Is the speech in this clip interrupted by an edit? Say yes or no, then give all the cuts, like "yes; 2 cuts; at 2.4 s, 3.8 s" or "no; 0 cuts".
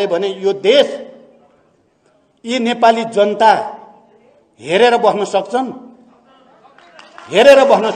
no; 0 cuts